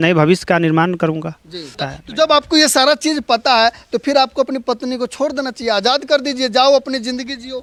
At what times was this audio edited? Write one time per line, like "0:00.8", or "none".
none